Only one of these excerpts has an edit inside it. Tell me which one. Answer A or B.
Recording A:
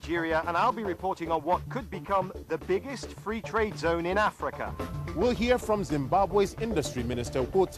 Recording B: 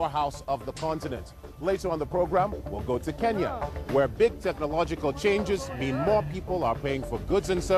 B